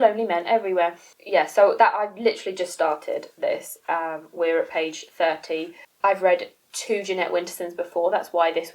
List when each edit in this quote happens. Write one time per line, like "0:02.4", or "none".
none

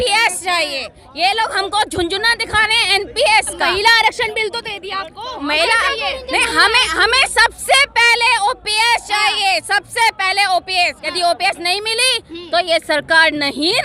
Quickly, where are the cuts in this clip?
none

